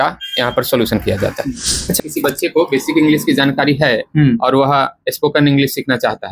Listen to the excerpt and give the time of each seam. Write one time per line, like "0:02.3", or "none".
0:02.0